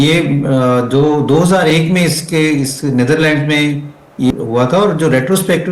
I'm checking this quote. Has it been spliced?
yes; 1 cut; at 4.3 s

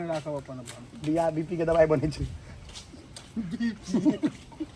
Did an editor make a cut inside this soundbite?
no; 0 cuts

